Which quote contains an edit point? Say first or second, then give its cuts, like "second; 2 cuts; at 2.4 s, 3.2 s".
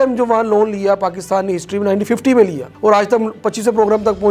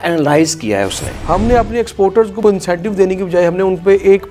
second; 2 cuts; at 1.1 s, 2.4 s